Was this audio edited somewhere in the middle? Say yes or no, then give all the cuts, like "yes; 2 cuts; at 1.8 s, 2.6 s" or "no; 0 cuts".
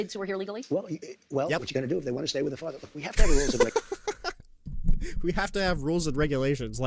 no; 0 cuts